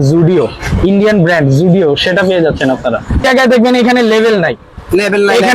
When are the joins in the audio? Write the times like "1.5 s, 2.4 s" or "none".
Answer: 3.2 s